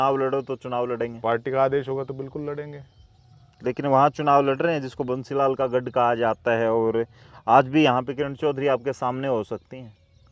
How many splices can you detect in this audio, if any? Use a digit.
0